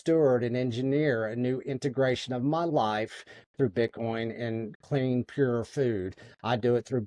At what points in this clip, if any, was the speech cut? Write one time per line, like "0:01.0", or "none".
none